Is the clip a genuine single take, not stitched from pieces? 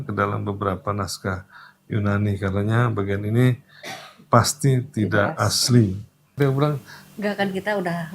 no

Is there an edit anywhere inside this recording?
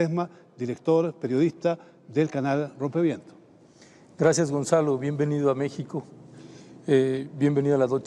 yes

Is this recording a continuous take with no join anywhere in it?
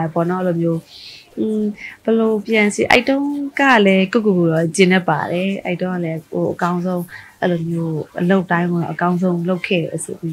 yes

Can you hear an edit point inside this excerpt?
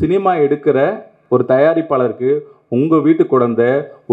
yes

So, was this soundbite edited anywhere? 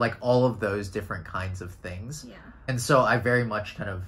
yes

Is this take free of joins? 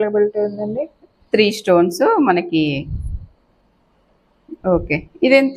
yes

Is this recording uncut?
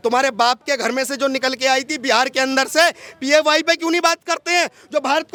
yes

